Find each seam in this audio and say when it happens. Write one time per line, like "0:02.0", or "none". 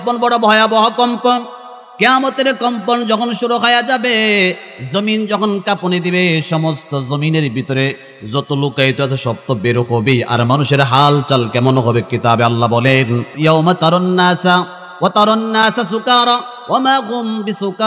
0:13.3